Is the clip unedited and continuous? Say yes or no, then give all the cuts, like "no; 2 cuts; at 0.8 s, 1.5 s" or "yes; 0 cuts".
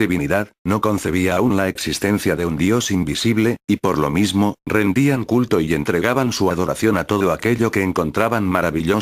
yes; 0 cuts